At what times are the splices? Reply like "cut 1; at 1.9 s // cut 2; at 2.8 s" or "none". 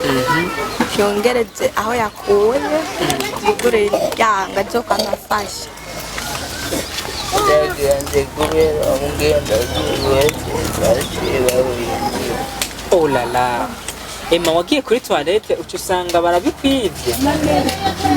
cut 1; at 6.2 s